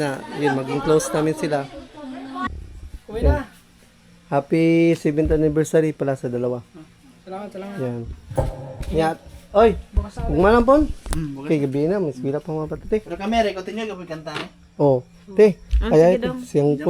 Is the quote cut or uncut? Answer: cut